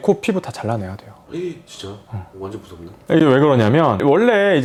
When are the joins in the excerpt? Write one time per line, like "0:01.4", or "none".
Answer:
none